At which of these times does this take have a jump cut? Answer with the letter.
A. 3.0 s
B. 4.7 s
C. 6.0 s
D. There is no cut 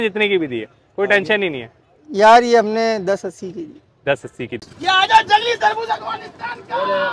B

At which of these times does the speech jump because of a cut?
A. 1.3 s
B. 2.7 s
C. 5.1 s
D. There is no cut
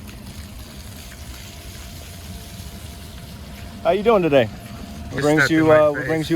C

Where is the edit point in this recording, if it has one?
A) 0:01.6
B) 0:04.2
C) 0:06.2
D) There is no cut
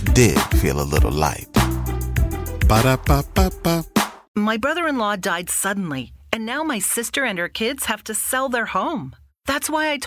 B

